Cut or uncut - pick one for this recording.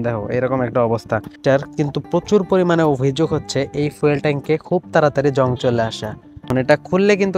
cut